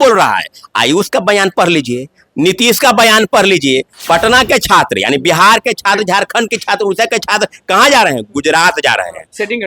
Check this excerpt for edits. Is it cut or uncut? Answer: cut